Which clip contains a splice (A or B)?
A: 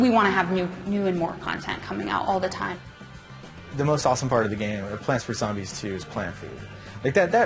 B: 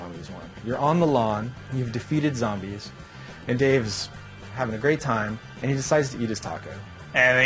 B